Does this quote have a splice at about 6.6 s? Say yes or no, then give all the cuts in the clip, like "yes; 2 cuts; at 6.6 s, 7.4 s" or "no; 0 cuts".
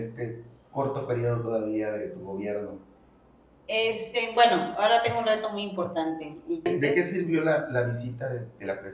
yes; 1 cut; at 6.6 s